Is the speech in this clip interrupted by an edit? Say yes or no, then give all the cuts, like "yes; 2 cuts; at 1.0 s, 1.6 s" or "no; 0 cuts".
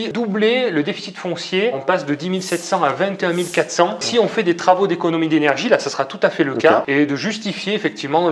no; 0 cuts